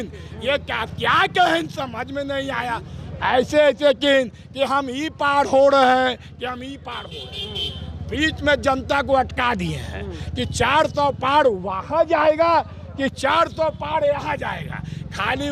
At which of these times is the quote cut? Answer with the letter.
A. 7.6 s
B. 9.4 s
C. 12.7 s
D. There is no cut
D